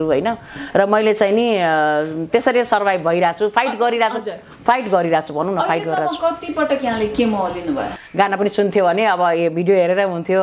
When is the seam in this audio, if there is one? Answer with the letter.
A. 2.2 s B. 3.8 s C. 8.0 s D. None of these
C